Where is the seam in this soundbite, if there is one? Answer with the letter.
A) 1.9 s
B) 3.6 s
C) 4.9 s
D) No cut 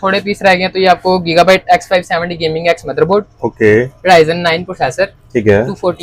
D